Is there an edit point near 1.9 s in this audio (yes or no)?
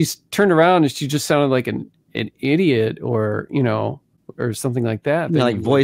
no